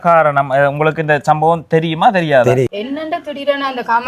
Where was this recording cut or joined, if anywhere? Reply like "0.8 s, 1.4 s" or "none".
2.7 s